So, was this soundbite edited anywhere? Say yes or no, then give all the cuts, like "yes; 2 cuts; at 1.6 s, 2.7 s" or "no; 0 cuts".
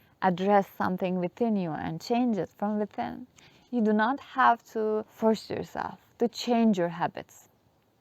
no; 0 cuts